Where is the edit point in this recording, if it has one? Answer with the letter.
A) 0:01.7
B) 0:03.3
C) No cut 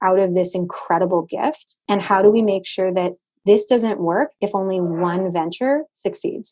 A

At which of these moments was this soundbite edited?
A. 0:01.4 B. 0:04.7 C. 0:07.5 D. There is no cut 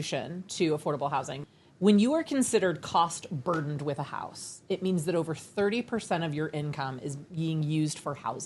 A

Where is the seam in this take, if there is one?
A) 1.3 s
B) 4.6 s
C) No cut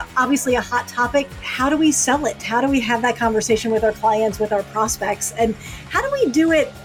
A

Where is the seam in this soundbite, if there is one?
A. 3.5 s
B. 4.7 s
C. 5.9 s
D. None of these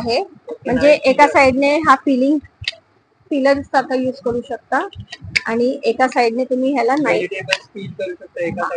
D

